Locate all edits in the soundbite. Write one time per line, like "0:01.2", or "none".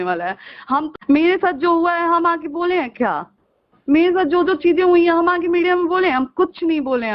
0:00.9